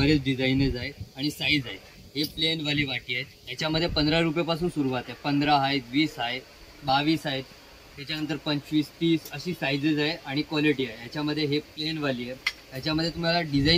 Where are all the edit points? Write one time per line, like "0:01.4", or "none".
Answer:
none